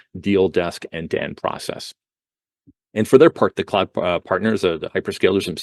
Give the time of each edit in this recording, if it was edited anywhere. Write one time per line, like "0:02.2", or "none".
none